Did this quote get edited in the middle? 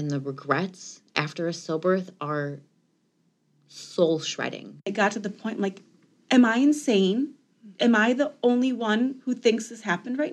yes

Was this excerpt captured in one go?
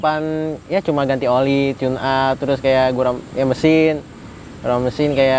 yes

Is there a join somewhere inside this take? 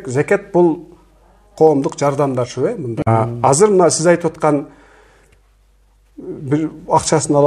yes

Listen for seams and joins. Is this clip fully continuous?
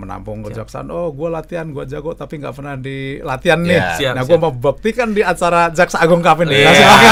yes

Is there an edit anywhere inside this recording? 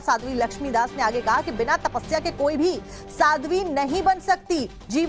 yes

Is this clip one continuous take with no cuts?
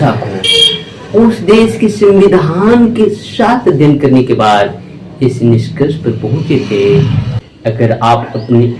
no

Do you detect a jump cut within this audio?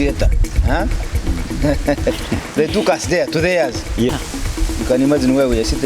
yes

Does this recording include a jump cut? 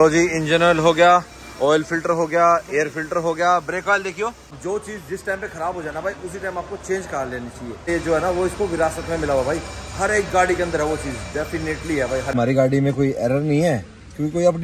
yes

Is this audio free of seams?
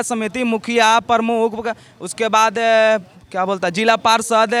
yes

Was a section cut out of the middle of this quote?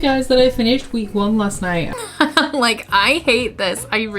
yes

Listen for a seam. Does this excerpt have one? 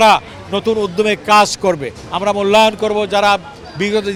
no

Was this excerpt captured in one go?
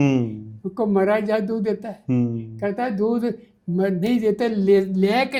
yes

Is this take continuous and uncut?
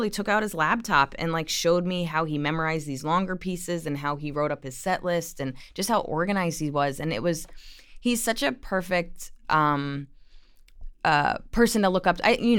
yes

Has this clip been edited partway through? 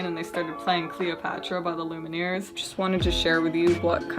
yes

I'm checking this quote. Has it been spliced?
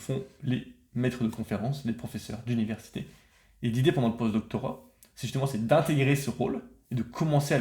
no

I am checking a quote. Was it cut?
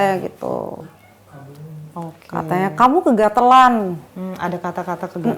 no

